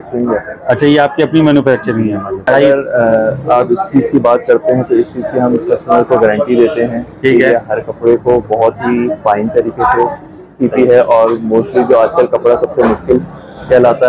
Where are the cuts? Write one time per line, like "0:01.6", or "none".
0:02.4